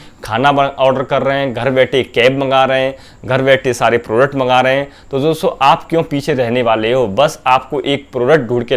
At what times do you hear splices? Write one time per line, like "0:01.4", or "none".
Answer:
none